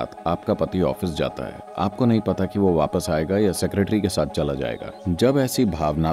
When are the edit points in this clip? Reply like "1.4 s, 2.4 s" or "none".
4.9 s